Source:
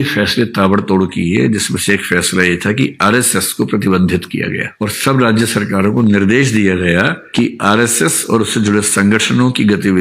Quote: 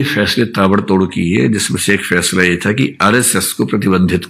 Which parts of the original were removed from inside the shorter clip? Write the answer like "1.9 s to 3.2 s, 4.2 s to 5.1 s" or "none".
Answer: none